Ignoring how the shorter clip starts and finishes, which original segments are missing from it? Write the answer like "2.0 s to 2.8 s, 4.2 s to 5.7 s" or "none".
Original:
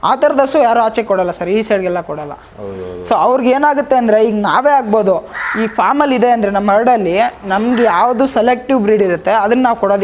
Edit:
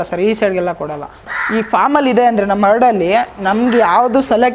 2.6 s to 5.4 s